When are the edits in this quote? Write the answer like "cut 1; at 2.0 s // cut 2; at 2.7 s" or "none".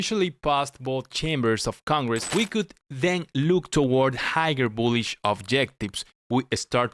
cut 1; at 2.3 s